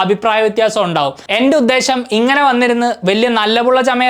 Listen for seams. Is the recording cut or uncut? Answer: cut